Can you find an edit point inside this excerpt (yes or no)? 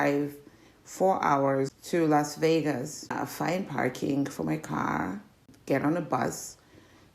yes